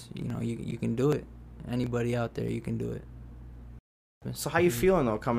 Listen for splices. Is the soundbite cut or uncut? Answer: cut